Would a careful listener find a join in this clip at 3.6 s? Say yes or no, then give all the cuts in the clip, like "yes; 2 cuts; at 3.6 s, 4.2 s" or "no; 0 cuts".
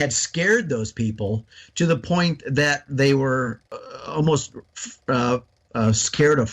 yes; 1 cut; at 3.6 s